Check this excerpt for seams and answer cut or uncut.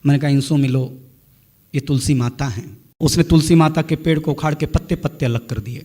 cut